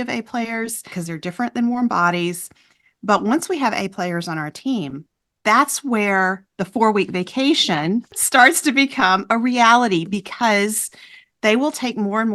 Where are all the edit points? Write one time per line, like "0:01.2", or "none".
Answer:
0:00.9
0:08.2